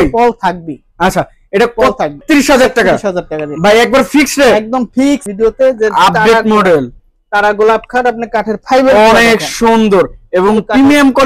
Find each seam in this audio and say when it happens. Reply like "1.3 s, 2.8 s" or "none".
2.2 s, 5.3 s

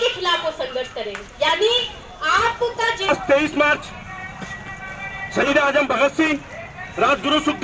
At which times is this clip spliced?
3.1 s

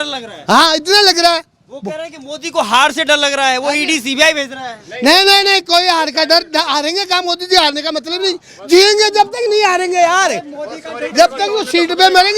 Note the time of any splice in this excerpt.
none

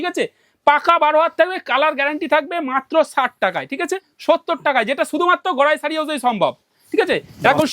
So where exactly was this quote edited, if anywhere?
4.1 s

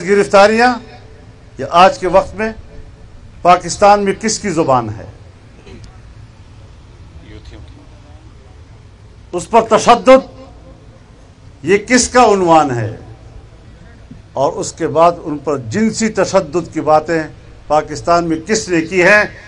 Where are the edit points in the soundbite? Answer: none

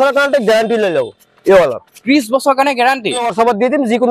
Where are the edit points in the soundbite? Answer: 3.2 s

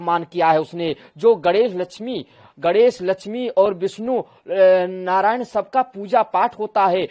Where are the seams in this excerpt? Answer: none

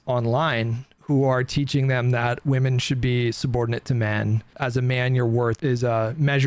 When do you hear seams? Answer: 4.5 s, 5.6 s

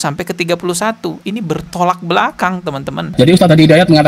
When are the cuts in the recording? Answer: 3.1 s

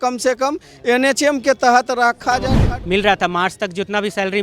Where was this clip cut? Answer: 2.6 s

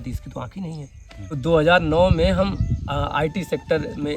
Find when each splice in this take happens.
1.4 s

